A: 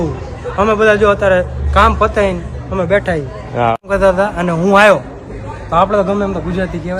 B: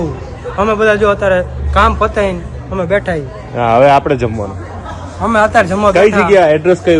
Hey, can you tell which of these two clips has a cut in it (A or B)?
A